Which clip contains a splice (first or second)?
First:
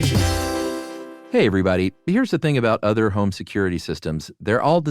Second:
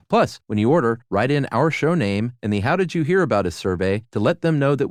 first